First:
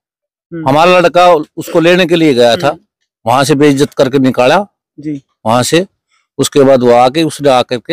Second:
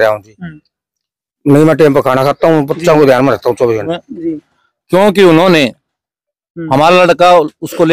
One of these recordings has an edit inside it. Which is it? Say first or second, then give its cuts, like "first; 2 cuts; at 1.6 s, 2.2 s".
second; 1 cut; at 3.9 s